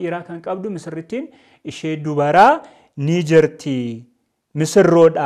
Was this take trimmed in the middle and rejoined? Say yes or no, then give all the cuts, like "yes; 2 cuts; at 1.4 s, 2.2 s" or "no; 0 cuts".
no; 0 cuts